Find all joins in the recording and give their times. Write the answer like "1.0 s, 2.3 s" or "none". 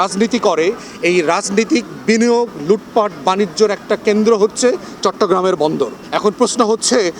6.0 s